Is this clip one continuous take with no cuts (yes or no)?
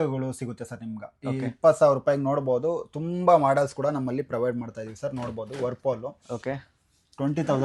yes